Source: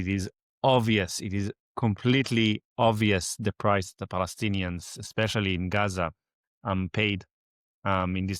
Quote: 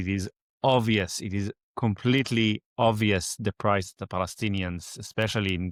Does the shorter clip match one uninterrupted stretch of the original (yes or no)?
yes